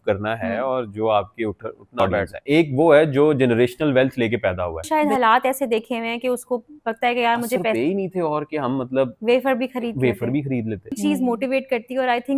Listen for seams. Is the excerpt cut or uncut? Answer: cut